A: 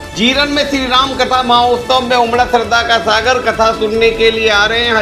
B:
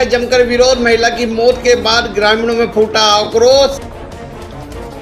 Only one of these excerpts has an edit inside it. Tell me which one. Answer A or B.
B